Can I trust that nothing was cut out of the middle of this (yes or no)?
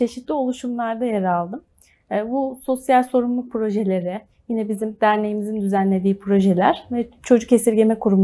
yes